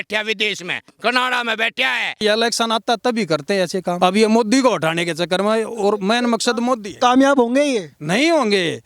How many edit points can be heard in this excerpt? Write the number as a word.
two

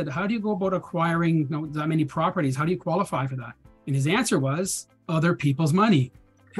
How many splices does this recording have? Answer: zero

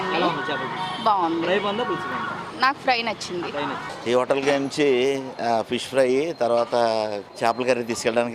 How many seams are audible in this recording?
two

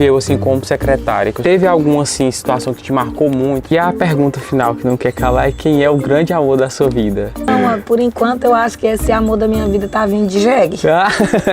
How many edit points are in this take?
three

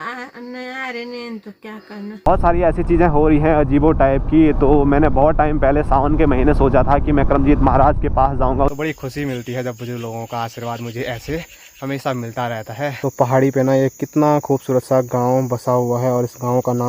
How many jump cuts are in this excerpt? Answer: three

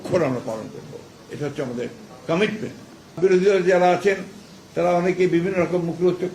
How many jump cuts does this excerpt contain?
one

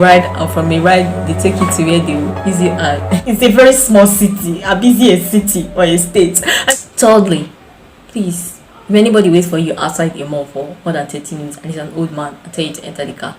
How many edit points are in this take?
two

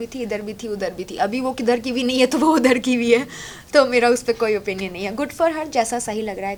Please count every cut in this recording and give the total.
zero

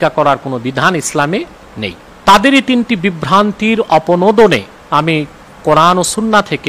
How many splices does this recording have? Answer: two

